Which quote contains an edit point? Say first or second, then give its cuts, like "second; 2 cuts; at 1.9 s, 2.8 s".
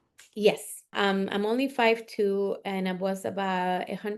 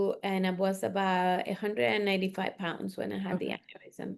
first; 1 cut; at 0.9 s